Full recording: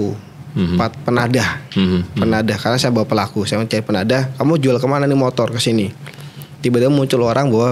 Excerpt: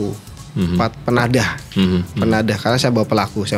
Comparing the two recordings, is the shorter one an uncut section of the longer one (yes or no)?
yes